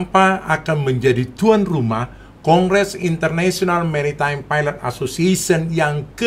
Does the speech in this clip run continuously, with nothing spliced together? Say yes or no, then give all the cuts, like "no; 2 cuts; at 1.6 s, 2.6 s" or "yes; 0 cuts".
yes; 0 cuts